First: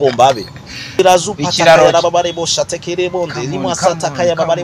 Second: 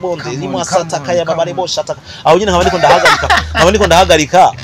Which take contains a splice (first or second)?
first